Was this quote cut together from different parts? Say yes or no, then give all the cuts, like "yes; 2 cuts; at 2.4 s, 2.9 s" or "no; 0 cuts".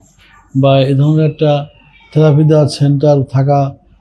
no; 0 cuts